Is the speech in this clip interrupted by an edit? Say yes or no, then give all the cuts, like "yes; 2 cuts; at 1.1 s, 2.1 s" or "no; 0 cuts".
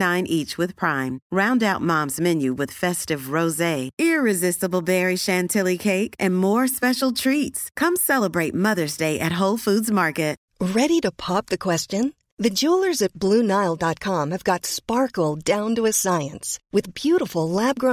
yes; 1 cut; at 10.5 s